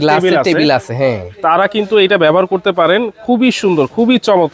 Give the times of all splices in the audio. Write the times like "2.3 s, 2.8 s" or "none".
none